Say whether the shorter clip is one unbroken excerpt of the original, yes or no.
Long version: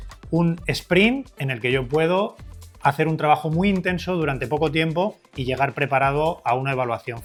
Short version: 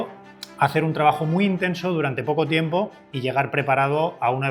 yes